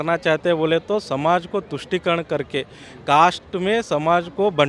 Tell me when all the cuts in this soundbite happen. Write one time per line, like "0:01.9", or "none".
none